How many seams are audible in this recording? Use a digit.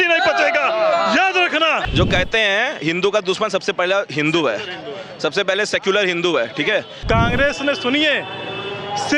2